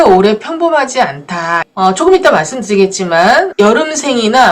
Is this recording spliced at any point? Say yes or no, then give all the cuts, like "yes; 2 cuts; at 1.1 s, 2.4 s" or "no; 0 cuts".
yes; 2 cuts; at 1.7 s, 3.5 s